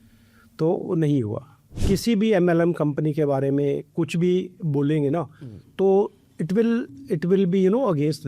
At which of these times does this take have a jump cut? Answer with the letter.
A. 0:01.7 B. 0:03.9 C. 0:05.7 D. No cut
A